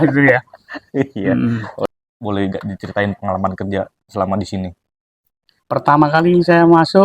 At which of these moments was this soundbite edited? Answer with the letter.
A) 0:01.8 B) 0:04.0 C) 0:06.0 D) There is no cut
A